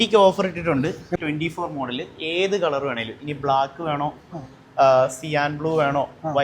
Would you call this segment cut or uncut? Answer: cut